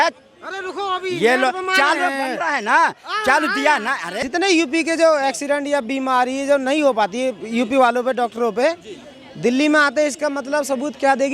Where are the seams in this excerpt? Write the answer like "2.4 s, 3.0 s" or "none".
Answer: 4.0 s